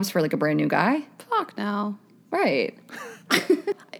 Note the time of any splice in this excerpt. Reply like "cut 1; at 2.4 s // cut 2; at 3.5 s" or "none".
none